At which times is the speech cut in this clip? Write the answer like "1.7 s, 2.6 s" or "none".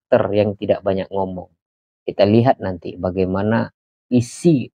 none